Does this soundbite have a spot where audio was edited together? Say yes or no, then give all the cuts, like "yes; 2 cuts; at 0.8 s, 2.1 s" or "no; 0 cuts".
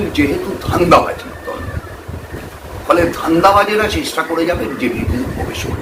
no; 0 cuts